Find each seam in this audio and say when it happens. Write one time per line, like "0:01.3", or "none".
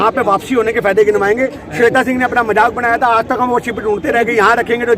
0:01.6